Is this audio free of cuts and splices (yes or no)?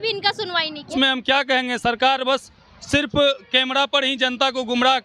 no